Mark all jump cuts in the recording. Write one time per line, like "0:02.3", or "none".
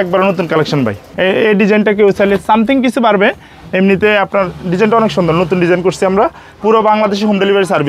0:01.1
0:06.4